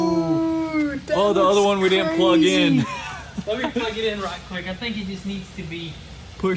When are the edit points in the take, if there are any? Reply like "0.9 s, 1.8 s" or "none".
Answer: none

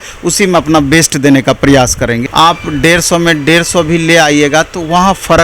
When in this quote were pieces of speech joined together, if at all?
2.2 s

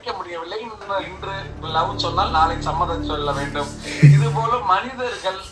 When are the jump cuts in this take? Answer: 1.2 s

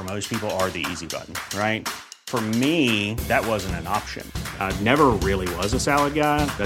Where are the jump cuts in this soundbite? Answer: none

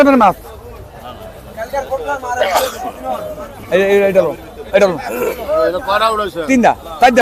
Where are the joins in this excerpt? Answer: none

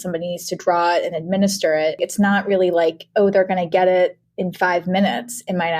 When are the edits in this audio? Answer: 2.0 s

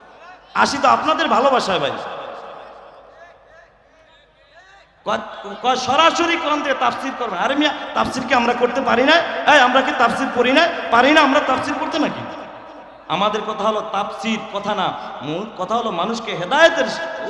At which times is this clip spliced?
none

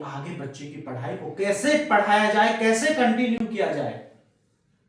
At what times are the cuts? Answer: none

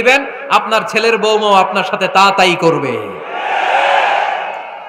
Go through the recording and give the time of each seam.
none

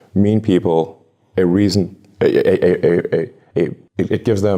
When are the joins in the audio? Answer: 3.6 s

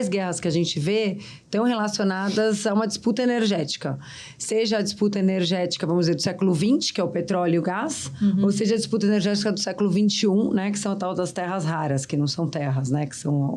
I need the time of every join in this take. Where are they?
none

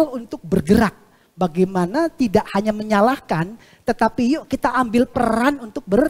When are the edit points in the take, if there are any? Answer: none

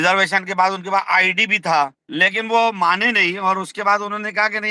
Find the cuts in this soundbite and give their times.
2.0 s

